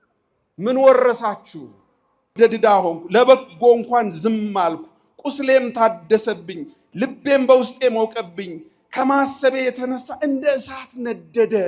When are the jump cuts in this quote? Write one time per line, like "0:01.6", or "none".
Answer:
0:02.3